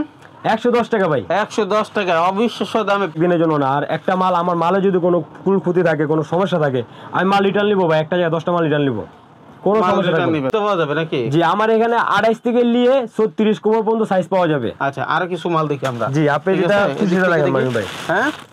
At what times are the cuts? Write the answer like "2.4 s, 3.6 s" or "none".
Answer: 3.1 s, 10.5 s